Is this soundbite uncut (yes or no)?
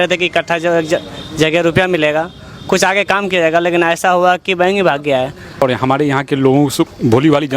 no